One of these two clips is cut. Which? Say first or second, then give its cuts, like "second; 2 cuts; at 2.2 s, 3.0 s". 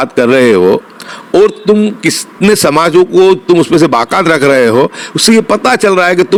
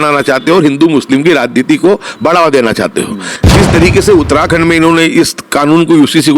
second; 1 cut; at 3.3 s